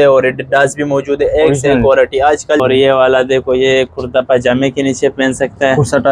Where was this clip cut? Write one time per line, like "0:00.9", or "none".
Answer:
0:02.6